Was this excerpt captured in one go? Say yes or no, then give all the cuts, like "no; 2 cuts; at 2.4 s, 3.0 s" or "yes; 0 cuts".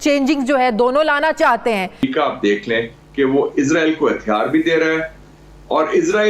no; 1 cut; at 2.0 s